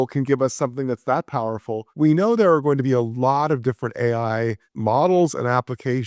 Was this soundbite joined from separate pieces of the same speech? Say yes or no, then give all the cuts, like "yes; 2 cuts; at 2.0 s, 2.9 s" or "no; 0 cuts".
no; 0 cuts